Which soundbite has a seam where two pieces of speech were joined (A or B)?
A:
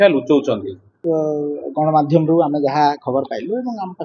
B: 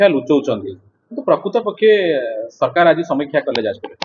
A